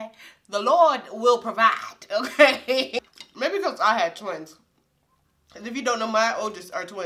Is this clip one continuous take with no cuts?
no; 1 cut; at 2.9 s

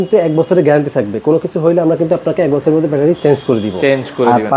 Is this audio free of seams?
yes; 0 cuts

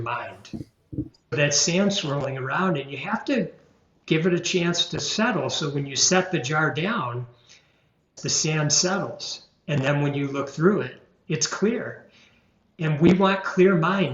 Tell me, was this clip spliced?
yes; 2 cuts; at 1.3 s, 8.2 s

